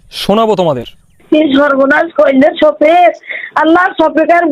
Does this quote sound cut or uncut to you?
cut